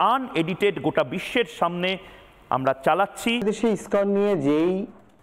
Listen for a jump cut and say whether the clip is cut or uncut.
cut